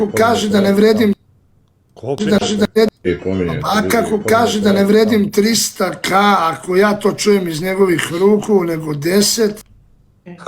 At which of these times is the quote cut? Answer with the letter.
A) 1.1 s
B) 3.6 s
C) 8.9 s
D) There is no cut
A